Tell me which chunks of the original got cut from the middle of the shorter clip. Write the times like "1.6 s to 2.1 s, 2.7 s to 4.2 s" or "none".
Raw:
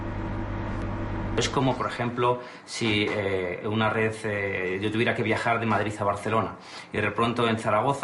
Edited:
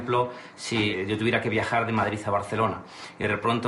3.0 s to 4.7 s